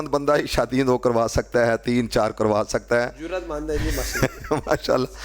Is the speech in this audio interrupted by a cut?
no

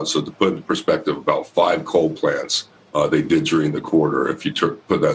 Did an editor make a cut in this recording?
no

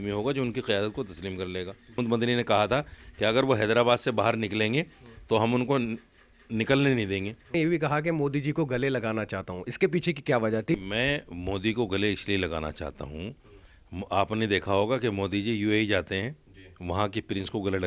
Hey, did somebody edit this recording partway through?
yes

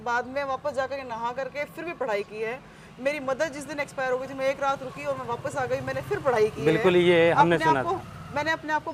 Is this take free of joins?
yes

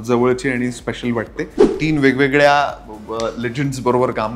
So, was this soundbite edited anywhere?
yes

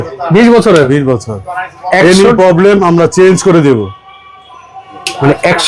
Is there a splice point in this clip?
no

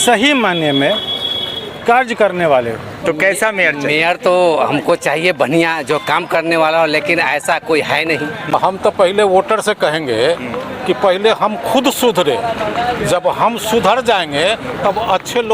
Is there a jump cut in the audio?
yes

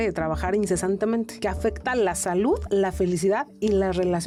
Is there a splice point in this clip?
no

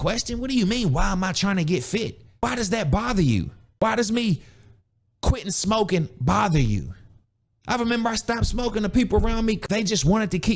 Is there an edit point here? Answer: yes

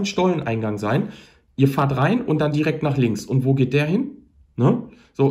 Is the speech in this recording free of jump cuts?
yes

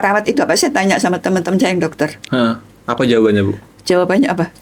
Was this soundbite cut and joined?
no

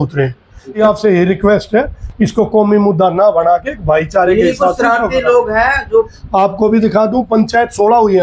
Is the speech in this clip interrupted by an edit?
yes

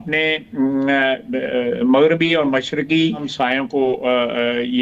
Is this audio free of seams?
no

